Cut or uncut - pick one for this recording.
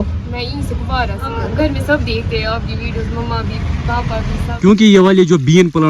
cut